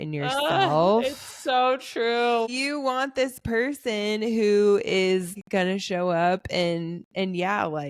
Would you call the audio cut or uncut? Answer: cut